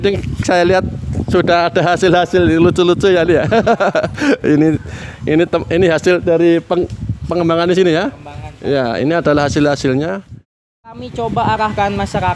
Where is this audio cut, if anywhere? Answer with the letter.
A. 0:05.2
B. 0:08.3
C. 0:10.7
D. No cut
C